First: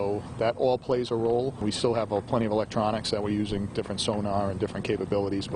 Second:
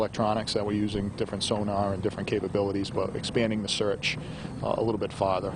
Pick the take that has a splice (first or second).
first